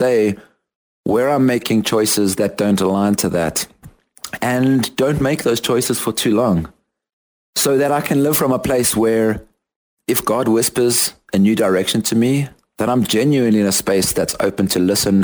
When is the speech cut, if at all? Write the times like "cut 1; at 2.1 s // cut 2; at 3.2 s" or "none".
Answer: none